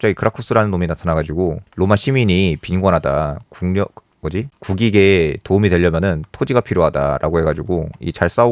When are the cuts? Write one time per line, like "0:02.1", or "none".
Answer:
none